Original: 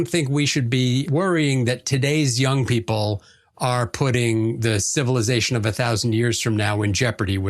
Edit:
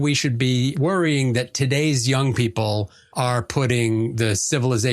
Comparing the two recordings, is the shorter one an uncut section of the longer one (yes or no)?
no